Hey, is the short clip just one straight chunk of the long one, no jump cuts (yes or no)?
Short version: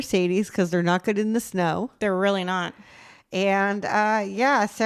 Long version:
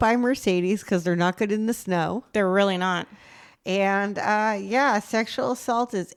yes